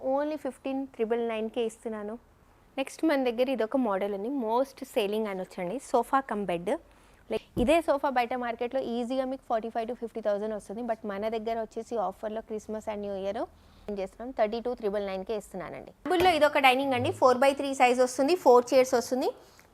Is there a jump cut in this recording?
yes; 4 cuts; at 2.6 s, 7.4 s, 13.9 s, 16.0 s

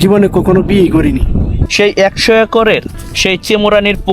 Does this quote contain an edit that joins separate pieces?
yes; 1 cut; at 1.6 s

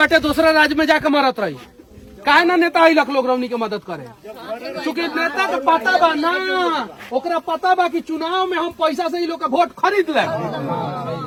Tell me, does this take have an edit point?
no; 0 cuts

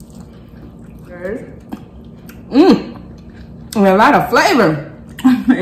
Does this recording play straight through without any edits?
no; 1 cut; at 1.1 s

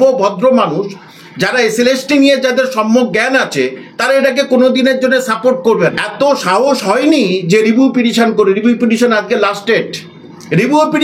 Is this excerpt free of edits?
no; 1 cut; at 6.0 s

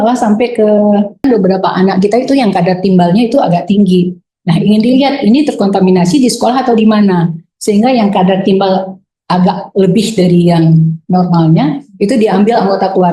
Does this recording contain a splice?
yes; 1 cut; at 1.2 s

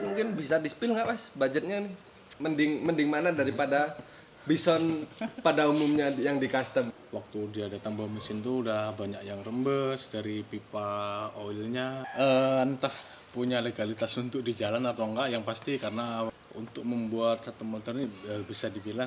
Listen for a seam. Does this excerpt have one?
yes; 4 cuts; at 2.3 s, 7.0 s, 12.1 s, 16.3 s

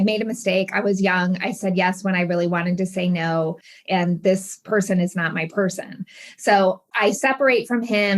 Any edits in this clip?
yes; 2 cuts; at 3.8 s, 6.9 s

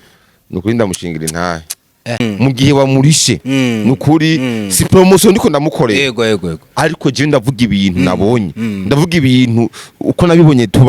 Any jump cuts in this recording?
yes; 1 cut; at 2.2 s

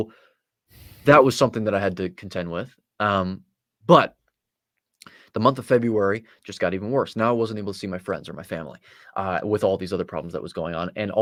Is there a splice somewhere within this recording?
no; 0 cuts

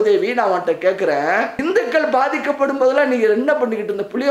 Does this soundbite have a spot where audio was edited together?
yes; 1 cut; at 1.5 s

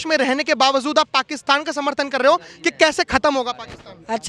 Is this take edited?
no; 0 cuts

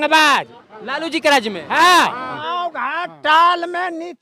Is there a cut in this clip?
yes; 1 cut; at 2.3 s

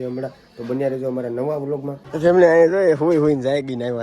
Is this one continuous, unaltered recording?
no; 1 cut; at 2.0 s

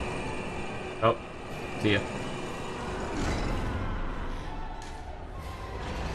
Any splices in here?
no; 0 cuts

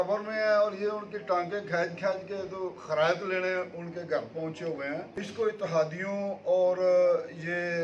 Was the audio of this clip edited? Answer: yes; 1 cut; at 5.1 s

